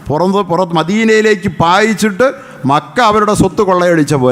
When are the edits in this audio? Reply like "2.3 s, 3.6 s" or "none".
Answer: none